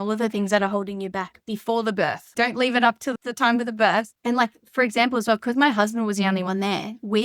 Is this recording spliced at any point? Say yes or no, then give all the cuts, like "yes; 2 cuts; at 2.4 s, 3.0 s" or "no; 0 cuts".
yes; 3 cuts; at 2.3 s, 3.1 s, 4.1 s